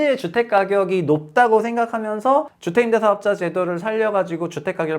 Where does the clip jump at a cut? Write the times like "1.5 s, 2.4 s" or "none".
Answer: 2.6 s